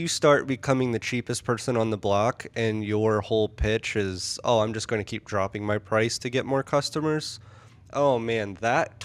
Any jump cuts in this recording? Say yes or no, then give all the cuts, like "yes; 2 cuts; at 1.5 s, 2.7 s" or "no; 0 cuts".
no; 0 cuts